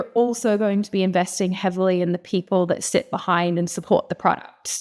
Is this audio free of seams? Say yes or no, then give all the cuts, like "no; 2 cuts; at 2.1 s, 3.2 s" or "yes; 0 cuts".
yes; 0 cuts